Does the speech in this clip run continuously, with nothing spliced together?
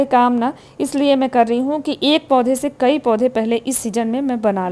yes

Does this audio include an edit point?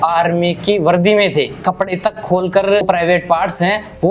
yes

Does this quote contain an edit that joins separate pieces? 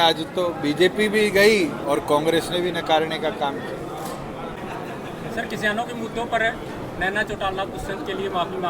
yes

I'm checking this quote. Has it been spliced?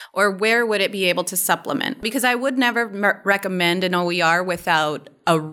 yes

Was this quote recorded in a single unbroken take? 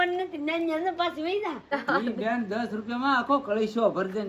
no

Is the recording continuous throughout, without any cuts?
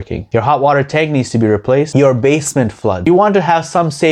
no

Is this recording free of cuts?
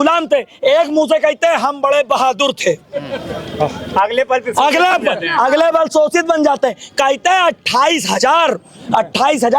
yes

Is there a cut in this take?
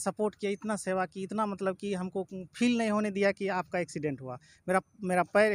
no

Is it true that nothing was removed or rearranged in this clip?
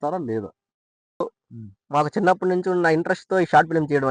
no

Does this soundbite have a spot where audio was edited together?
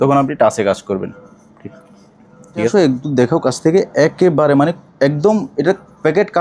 yes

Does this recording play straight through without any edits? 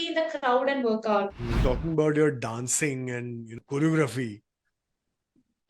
no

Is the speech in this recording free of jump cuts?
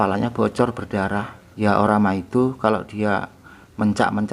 no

